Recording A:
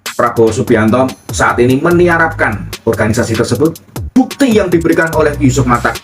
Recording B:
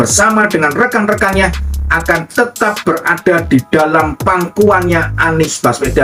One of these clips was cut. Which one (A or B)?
A